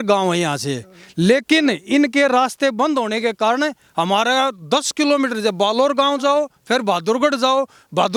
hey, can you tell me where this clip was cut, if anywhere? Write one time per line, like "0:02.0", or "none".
none